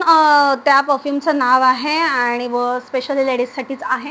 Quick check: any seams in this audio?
no; 0 cuts

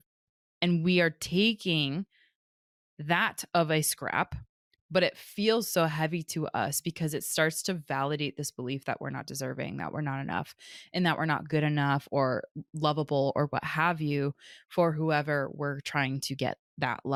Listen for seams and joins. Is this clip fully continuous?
yes; 0 cuts

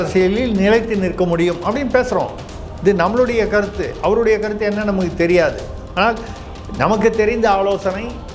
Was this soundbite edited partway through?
no; 0 cuts

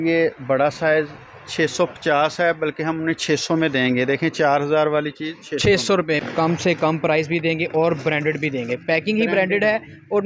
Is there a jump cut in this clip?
yes; 1 cut; at 6.2 s

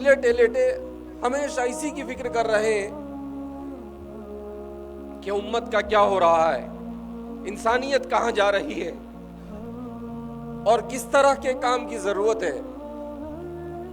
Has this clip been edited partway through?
yes; 3 cuts; at 8.9 s, 10.3 s, 12.6 s

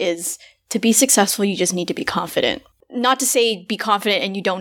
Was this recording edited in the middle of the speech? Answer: yes; 1 cut; at 2.8 s

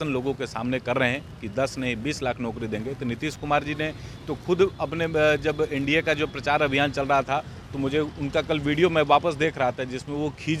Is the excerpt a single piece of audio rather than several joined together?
yes; 0 cuts

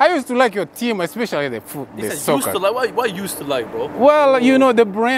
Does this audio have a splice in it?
no; 0 cuts

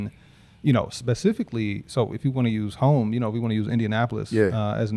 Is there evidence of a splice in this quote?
no; 0 cuts

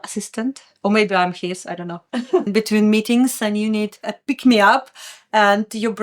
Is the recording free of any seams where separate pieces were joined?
no; 1 cut; at 2.5 s

